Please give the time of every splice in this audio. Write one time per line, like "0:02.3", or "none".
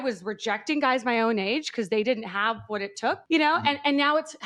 none